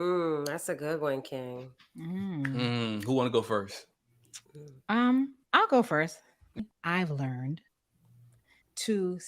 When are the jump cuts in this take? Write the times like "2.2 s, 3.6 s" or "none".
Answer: 6.6 s